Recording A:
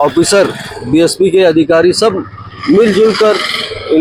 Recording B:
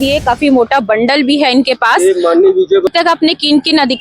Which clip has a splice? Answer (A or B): B